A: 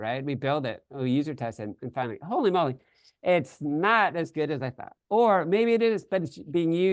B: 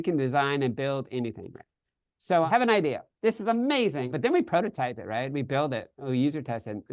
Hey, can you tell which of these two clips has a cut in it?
B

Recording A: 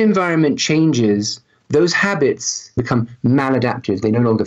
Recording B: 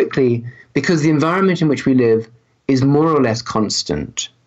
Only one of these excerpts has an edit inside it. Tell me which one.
A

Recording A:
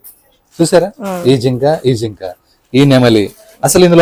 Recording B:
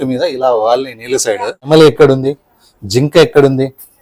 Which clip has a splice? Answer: B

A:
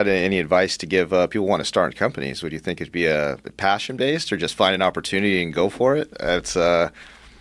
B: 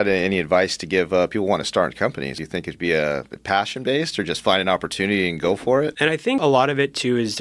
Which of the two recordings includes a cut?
B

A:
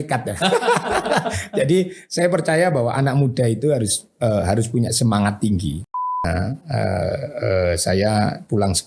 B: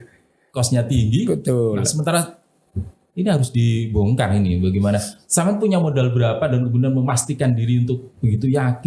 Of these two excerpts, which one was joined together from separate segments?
A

